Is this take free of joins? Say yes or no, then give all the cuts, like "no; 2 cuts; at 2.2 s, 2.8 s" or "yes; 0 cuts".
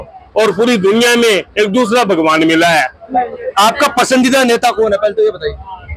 no; 1 cut; at 3.2 s